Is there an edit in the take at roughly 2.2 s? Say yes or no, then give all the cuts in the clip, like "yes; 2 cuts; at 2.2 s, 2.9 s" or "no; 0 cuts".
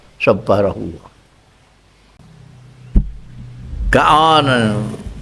yes; 1 cut; at 2.2 s